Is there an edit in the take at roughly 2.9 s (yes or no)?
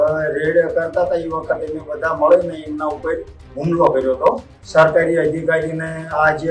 no